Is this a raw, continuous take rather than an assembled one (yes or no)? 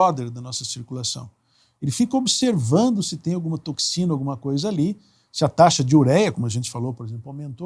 yes